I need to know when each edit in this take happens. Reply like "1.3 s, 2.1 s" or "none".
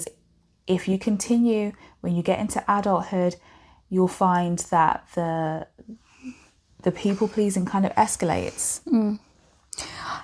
none